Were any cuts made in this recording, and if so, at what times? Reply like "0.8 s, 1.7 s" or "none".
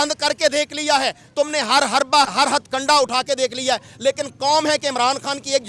2.3 s

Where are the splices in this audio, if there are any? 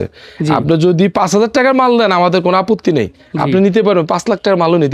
none

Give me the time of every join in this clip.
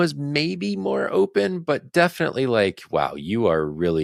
none

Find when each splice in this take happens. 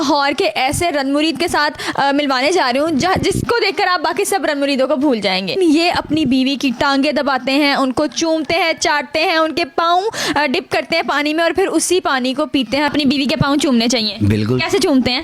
5.5 s, 12.9 s

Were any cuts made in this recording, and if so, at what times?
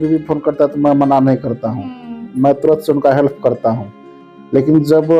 none

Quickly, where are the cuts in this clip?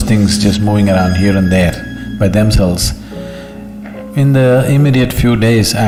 none

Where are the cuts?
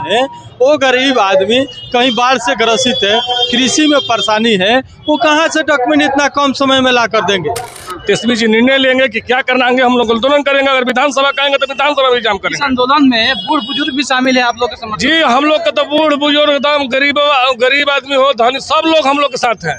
7.8 s

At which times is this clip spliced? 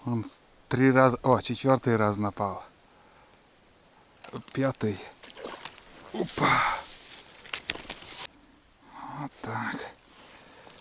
8.3 s

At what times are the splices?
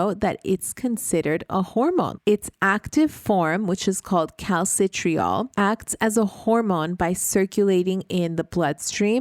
2.1 s, 5.5 s

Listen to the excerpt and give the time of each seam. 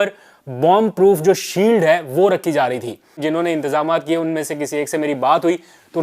3.2 s

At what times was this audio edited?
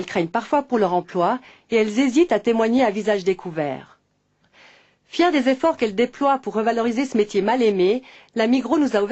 1.8 s

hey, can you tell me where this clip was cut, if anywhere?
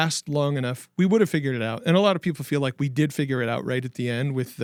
none

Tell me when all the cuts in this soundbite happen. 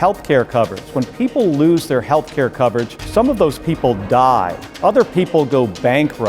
1.0 s, 3.0 s, 4.6 s

